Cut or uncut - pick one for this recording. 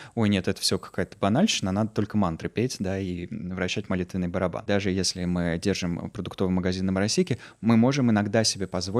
cut